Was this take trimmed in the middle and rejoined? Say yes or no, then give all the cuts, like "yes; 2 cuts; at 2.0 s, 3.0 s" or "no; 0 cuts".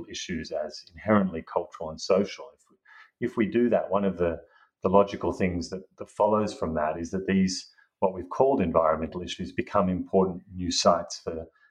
no; 0 cuts